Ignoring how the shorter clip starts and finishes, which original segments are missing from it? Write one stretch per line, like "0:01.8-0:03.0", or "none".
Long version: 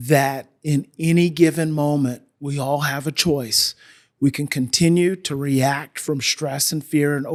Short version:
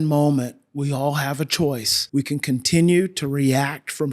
0:03.6-0:04.0